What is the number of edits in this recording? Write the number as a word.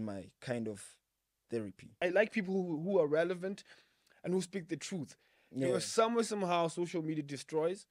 one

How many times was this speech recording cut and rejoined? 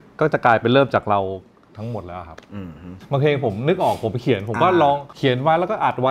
two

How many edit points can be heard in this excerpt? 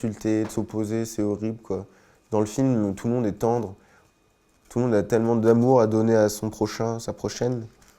zero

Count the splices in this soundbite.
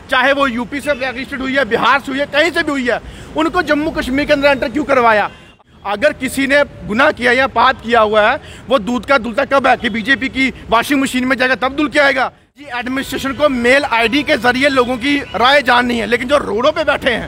two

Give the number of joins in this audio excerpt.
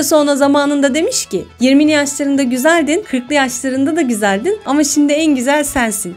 zero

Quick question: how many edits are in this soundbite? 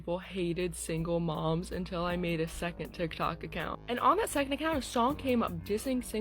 one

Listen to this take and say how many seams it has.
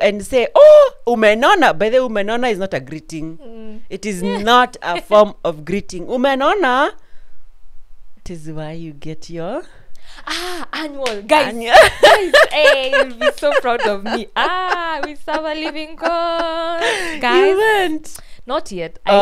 one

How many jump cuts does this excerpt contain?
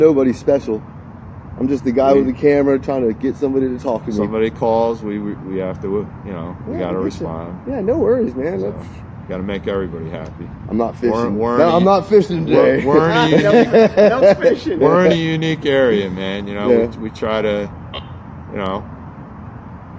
zero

